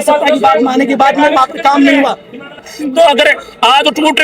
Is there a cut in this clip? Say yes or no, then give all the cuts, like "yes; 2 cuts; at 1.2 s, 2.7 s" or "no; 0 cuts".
yes; 1 cut; at 2.7 s